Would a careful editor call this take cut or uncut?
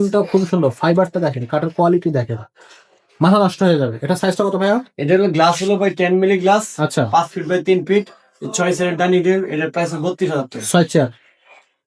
uncut